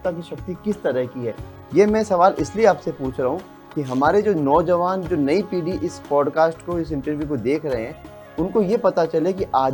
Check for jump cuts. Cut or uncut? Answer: uncut